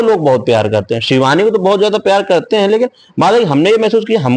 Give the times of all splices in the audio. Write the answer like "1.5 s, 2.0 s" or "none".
none